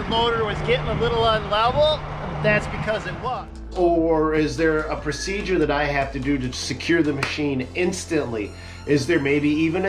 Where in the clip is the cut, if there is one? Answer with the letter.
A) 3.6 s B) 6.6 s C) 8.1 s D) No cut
A